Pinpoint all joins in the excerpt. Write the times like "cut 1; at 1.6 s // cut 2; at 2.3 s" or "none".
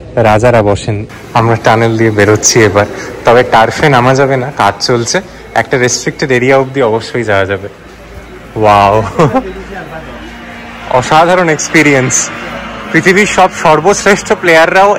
cut 1; at 1.0 s

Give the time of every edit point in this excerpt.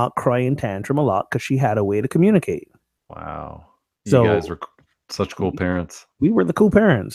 none

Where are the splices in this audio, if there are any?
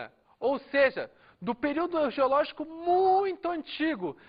none

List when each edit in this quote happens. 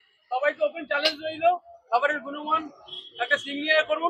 none

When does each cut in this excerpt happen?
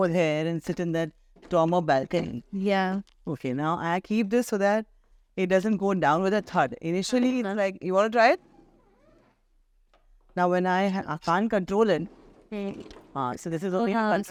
none

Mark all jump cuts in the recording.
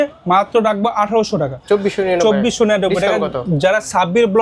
cut 1; at 1.5 s

